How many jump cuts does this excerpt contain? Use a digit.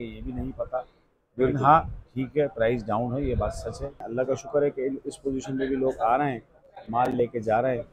1